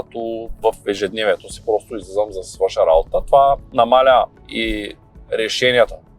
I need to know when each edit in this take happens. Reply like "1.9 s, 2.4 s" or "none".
3.7 s, 4.4 s